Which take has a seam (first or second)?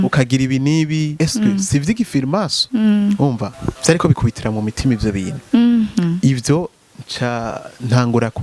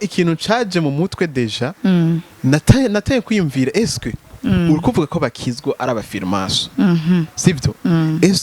first